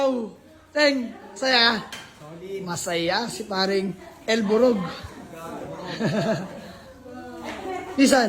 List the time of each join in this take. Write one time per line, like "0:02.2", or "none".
none